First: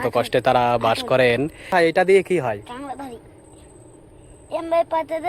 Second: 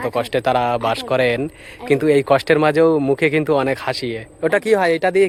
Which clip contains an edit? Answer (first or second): first